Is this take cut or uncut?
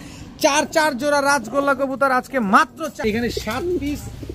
cut